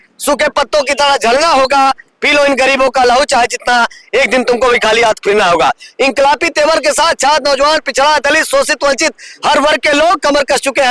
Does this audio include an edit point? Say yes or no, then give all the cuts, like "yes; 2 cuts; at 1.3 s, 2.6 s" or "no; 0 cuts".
no; 0 cuts